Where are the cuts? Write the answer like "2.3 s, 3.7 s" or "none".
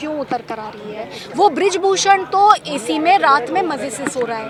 none